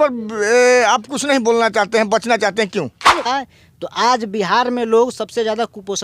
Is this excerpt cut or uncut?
cut